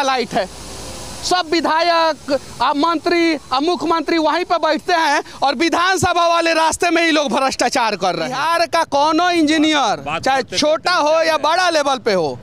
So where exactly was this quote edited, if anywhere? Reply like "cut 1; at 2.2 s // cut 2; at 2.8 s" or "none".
cut 1; at 8.4 s